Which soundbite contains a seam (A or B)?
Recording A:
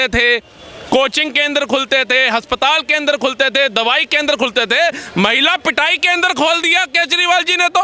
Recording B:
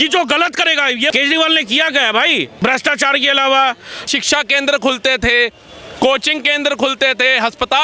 B